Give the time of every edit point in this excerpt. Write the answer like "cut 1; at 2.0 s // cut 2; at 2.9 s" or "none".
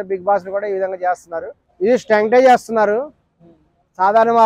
cut 1; at 1.6 s

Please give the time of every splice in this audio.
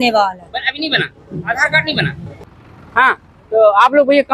cut 1; at 2.3 s

